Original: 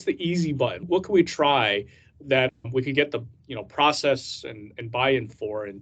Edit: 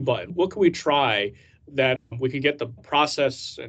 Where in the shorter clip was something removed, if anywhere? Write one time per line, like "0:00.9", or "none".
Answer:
0:02.7